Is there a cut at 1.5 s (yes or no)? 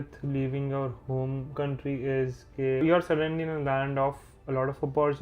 yes